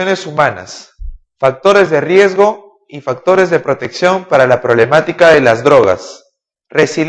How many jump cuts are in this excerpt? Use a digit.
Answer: 1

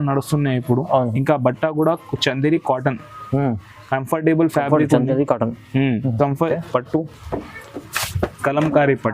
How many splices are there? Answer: 1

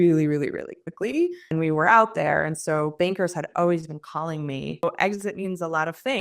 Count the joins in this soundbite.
2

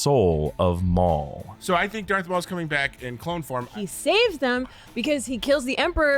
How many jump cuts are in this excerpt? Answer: 2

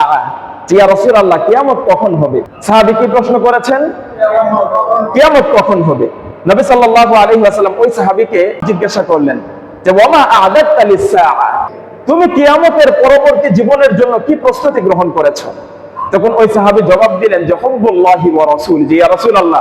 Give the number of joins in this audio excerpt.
2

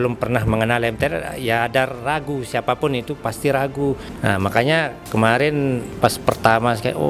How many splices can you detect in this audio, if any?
3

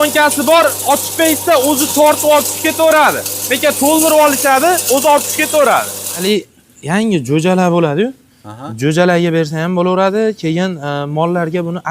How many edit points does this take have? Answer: 1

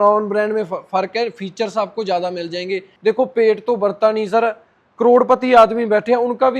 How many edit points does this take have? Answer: 1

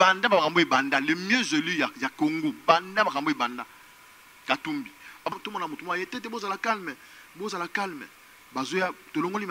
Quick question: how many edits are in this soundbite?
1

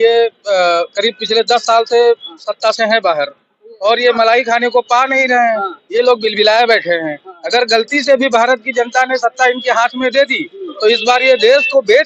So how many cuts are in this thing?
0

